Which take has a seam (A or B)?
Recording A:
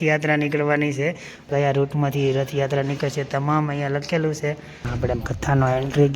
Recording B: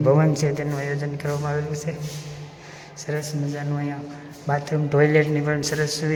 A